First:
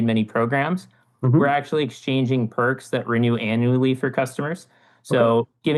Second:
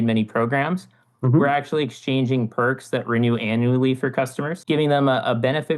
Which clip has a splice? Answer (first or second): second